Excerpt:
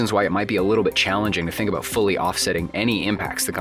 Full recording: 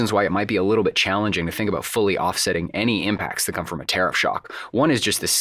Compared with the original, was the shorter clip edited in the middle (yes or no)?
no